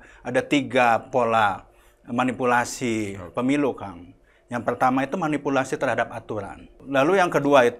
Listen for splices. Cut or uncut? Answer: cut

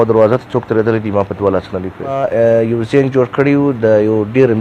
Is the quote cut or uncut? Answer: cut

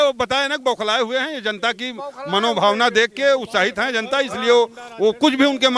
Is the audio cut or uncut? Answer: uncut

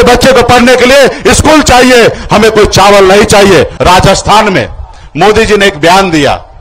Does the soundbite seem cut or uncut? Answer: cut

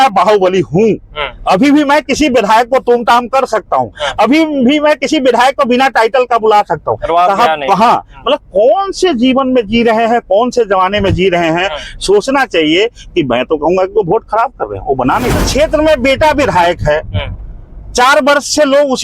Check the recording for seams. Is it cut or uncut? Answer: cut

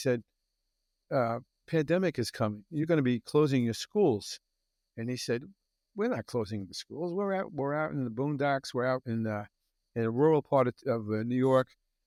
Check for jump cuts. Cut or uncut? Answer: uncut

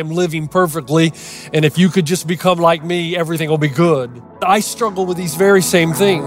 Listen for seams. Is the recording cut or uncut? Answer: cut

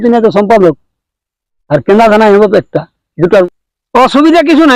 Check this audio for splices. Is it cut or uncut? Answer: cut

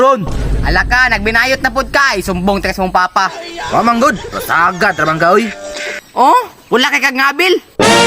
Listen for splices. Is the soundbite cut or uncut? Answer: uncut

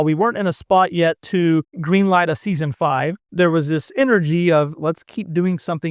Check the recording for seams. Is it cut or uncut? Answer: cut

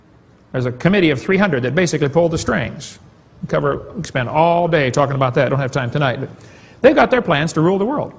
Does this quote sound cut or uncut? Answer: cut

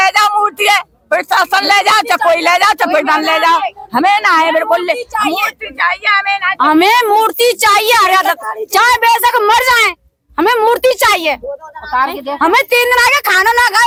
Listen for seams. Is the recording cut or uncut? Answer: uncut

